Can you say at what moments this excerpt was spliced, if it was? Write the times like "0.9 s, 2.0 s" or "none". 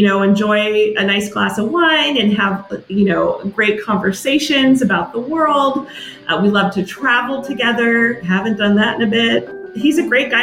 9.5 s